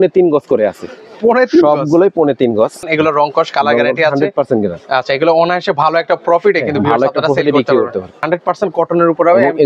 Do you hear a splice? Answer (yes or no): yes